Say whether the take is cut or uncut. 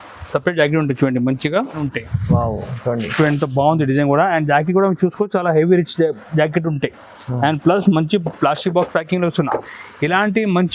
cut